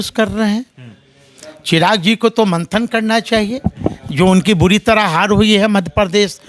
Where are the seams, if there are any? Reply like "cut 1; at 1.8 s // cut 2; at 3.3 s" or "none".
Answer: none